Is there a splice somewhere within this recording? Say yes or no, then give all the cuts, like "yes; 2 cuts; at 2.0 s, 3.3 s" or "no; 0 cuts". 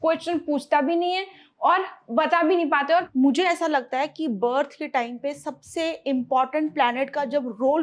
yes; 1 cut; at 3.1 s